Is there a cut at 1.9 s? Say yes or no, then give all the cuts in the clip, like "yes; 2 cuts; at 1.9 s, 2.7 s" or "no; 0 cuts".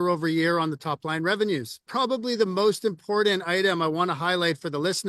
yes; 1 cut; at 1.9 s